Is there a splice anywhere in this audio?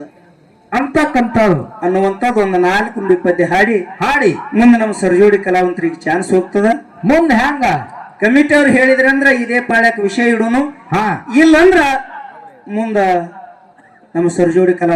no; 0 cuts

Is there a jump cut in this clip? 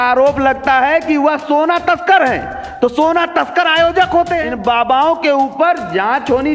yes; 1 cut; at 4.5 s

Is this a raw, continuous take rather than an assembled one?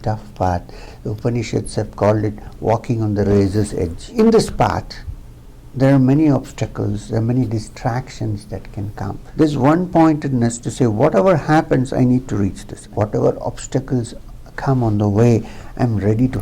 no; 3 cuts; at 4.0 s, 9.2 s, 12.8 s

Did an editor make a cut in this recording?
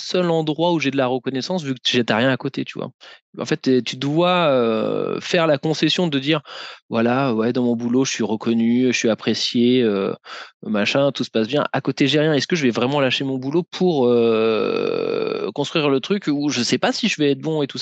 no; 0 cuts

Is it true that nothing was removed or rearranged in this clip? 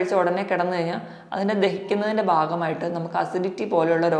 yes; 0 cuts

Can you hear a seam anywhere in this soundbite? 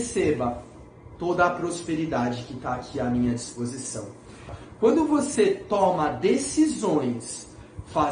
yes; 1 cut; at 4.6 s

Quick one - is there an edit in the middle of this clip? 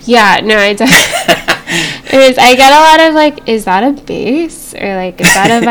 no; 0 cuts

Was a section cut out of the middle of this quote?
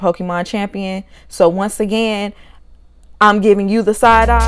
no; 0 cuts

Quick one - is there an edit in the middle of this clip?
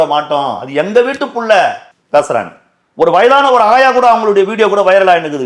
no; 0 cuts

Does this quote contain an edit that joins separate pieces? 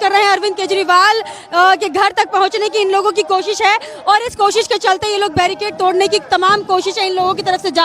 no; 0 cuts

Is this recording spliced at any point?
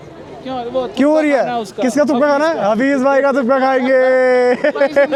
no; 0 cuts

